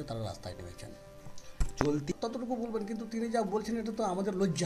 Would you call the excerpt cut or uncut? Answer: cut